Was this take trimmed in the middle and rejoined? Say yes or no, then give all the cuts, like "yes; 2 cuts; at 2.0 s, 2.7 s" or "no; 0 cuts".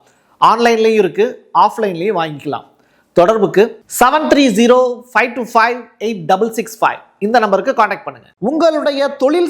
yes; 1 cut; at 8.2 s